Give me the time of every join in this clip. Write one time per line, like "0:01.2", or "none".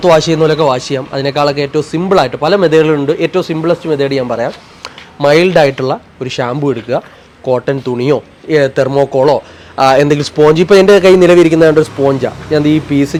none